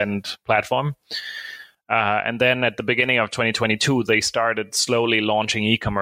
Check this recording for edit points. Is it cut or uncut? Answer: uncut